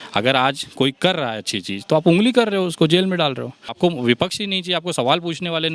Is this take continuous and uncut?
no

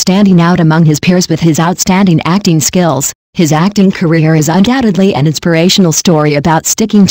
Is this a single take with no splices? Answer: no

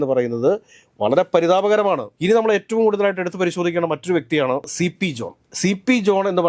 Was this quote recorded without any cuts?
yes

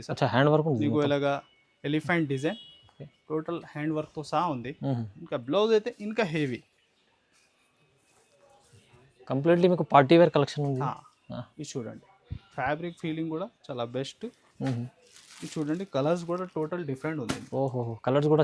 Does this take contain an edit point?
no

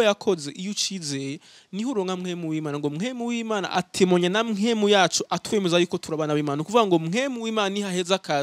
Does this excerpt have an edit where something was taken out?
no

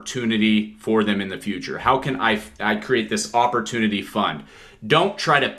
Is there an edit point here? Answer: no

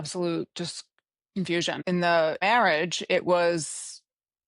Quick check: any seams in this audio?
yes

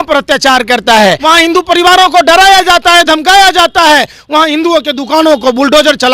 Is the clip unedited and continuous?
no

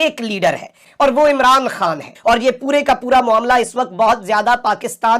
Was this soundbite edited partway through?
yes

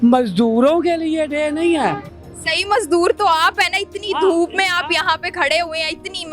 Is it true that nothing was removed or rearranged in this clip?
yes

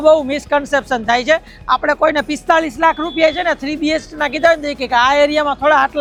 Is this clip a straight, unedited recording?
yes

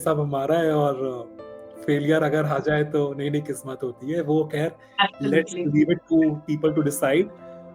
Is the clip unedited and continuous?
yes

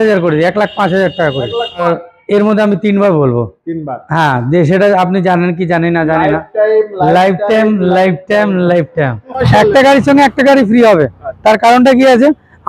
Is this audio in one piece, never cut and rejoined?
no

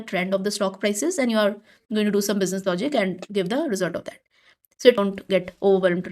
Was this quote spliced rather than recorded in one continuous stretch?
yes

